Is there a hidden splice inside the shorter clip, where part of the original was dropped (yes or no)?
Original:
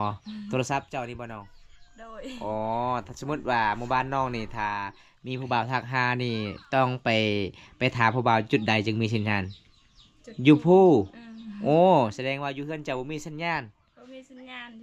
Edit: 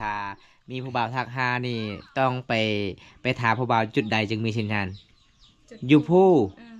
no